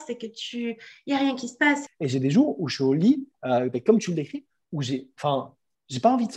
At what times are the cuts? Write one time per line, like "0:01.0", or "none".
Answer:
0:01.9